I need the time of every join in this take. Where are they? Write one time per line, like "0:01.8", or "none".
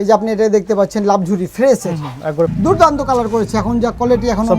0:02.5